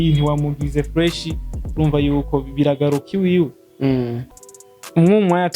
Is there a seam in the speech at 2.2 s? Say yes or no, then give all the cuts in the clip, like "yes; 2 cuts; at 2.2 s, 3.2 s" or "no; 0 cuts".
no; 1 cut; at 4.2 s